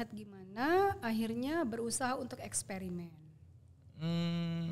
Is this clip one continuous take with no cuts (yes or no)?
yes